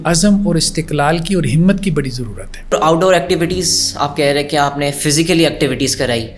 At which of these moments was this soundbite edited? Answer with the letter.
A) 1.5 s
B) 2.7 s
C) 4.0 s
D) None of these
B